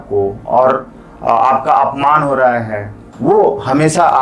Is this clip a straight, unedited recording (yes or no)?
no